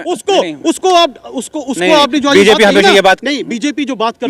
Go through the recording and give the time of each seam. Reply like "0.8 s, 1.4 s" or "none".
none